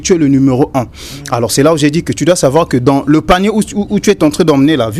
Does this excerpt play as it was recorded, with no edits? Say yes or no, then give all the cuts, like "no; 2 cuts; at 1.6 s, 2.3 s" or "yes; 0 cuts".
yes; 0 cuts